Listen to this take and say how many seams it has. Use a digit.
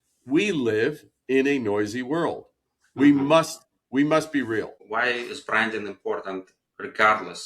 1